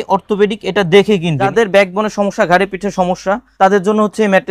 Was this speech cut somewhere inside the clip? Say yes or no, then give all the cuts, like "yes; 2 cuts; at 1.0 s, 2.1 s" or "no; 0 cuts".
yes; 2 cuts; at 1.5 s, 3.5 s